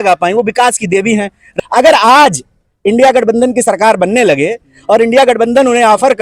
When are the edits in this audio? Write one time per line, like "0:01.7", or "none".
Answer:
0:01.4